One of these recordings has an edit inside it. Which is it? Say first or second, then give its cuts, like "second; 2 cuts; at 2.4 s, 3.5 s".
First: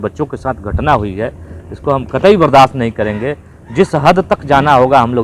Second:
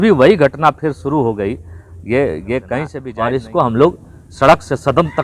second; 1 cut; at 3.0 s